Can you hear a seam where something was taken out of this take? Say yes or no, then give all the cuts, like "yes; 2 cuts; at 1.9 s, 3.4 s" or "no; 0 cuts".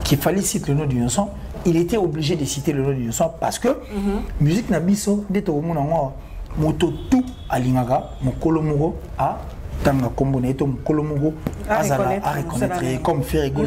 no; 0 cuts